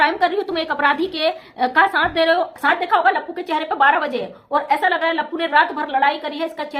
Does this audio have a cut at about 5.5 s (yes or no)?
no